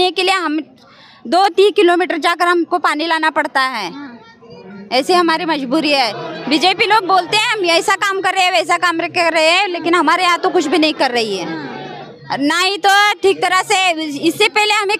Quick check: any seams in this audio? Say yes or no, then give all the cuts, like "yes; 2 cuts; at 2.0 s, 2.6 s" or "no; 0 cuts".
no; 0 cuts